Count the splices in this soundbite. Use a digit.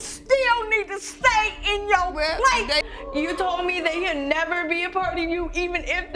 1